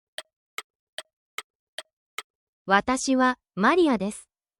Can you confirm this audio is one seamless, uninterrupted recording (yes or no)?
yes